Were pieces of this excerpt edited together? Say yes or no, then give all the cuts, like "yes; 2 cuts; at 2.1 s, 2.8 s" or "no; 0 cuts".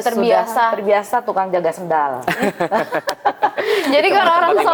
no; 0 cuts